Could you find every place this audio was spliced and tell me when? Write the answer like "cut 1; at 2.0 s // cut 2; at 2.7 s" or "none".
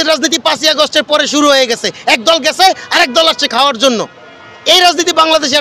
none